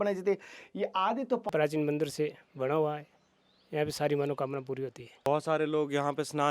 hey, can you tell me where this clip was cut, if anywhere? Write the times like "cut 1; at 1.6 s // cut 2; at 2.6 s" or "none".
cut 1; at 1.5 s // cut 2; at 5.3 s